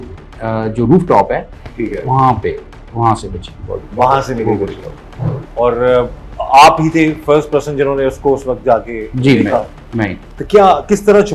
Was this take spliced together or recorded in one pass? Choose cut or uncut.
uncut